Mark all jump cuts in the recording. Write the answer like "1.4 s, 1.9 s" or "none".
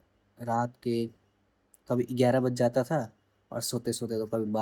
none